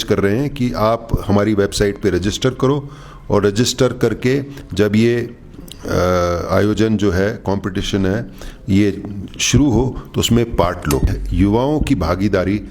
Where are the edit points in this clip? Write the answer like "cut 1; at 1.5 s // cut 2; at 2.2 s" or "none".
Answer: cut 1; at 11.2 s